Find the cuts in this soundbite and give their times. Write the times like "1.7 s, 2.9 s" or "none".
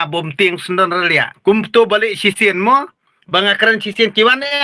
1.3 s